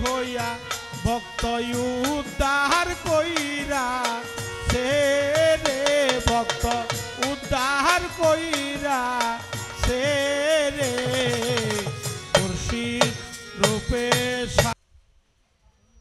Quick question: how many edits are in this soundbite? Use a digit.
1